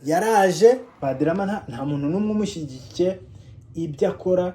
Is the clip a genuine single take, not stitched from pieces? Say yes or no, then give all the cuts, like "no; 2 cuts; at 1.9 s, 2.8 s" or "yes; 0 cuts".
no; 1 cut; at 0.9 s